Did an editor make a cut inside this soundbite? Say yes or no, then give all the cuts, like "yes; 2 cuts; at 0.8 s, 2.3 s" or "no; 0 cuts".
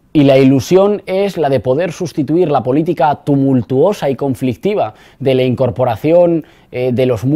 no; 0 cuts